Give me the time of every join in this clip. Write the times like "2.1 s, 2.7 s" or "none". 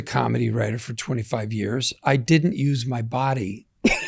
none